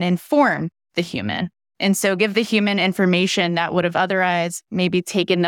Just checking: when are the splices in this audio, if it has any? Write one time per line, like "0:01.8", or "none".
none